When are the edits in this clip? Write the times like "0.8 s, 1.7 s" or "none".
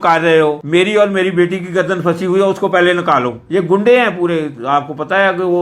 3.4 s